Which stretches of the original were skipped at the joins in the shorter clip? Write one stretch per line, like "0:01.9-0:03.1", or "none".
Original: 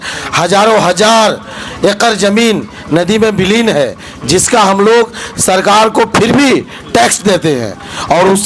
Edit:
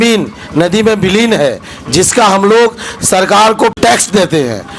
0:06.1-0:06.9